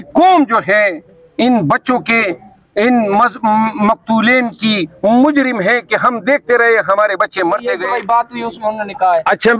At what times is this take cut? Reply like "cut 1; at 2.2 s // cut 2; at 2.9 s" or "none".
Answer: cut 1; at 7.6 s